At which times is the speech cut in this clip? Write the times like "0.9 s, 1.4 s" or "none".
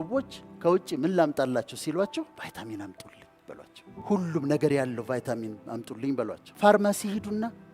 2.3 s, 4.0 s, 6.4 s